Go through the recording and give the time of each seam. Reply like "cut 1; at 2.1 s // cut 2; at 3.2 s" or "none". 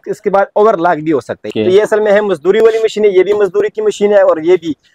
cut 1; at 1.5 s